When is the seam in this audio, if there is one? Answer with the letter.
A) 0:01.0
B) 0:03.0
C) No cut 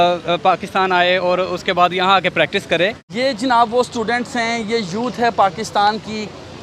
B